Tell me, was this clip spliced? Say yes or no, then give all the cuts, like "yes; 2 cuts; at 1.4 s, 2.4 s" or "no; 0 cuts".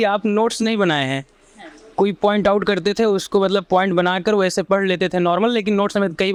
no; 0 cuts